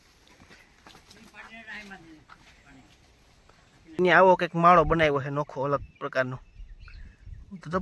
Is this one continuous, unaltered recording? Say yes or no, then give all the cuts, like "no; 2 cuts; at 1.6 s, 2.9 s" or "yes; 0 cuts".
no; 1 cut; at 4.0 s